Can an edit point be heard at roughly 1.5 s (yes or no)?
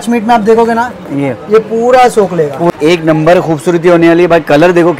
no